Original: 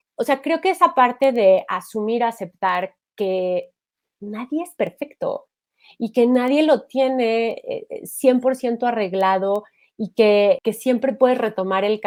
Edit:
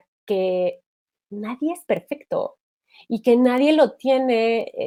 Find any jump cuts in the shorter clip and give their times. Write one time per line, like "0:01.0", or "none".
none